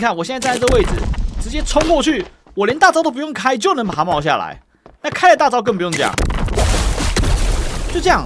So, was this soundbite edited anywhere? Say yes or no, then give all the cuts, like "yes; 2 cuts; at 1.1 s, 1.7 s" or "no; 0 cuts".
no; 0 cuts